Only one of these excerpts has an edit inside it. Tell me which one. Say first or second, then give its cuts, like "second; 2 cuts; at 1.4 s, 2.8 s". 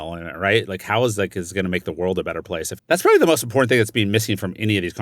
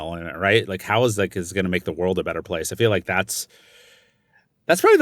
first; 1 cut; at 2.7 s